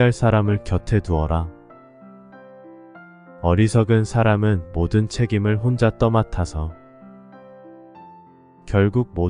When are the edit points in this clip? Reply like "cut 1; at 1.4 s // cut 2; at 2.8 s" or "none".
cut 1; at 1.9 s // cut 2; at 3.4 s

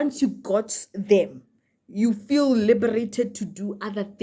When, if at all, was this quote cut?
none

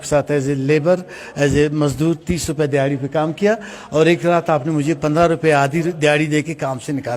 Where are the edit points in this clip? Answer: none

